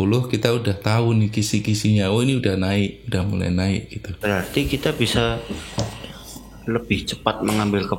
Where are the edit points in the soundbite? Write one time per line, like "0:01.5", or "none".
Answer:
0:04.2

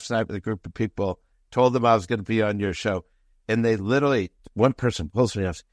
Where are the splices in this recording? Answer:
none

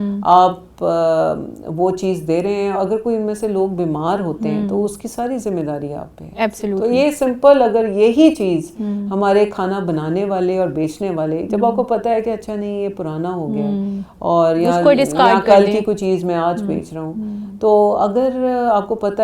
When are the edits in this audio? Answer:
none

